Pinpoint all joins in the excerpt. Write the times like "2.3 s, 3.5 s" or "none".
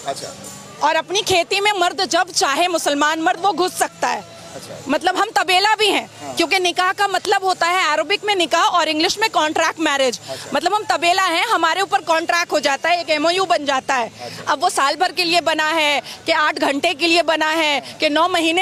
none